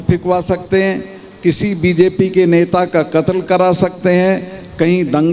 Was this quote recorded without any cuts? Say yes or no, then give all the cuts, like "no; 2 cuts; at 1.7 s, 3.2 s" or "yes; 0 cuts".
yes; 0 cuts